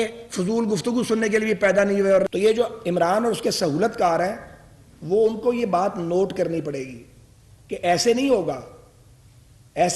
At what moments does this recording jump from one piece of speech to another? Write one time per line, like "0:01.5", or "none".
0:02.3